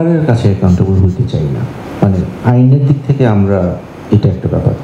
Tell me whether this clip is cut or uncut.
uncut